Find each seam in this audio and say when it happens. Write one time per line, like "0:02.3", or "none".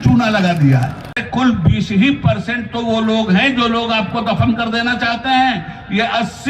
0:01.2